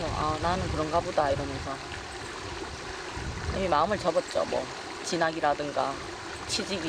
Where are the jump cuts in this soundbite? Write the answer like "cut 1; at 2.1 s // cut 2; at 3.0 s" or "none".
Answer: none